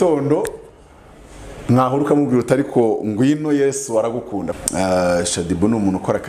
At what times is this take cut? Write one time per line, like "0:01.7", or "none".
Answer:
0:04.5